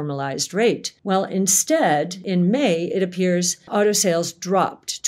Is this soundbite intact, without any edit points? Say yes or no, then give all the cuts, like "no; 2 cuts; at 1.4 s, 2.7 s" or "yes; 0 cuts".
no; 3 cuts; at 0.9 s, 2.2 s, 3.6 s